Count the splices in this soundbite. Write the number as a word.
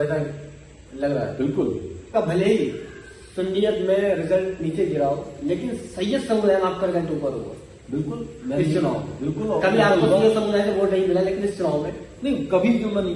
one